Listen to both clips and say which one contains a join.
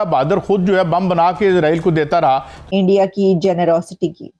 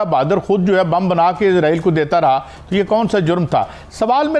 first; 1 cut; at 2.6 s

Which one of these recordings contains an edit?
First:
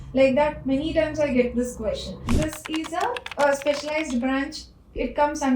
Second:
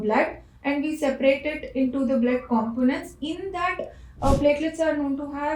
first; 1 cut; at 2.2 s

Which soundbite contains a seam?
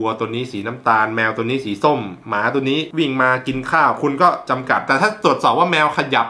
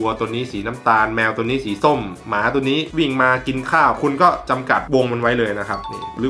first; 1 cut; at 4.9 s

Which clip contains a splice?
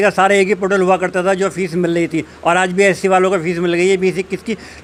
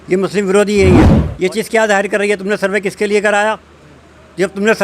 second; 1 cut; at 1.2 s

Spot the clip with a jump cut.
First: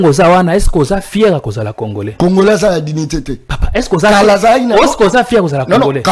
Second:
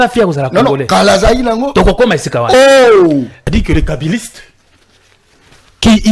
second; 1 cut; at 3.4 s

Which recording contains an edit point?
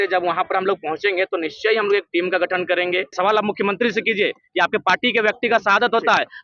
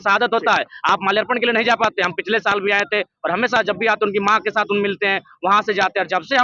first; 1 cut; at 3.1 s

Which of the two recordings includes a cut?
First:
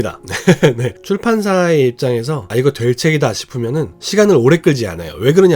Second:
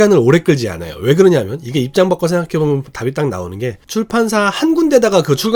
first; 1 cut; at 1.0 s

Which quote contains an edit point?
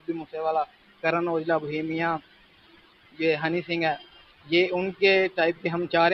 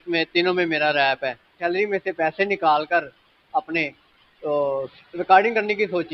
second; 1 cut; at 1.6 s

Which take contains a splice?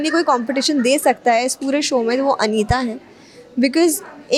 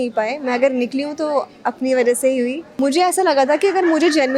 second; 1 cut; at 2.8 s

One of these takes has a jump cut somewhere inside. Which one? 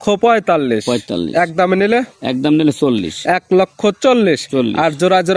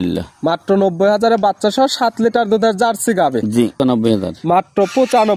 second; 1 cut; at 3.8 s

